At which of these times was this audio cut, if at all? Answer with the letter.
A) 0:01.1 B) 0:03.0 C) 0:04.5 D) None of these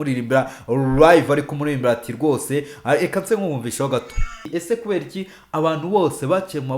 C